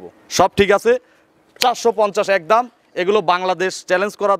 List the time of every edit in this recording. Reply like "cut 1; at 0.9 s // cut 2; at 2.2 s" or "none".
none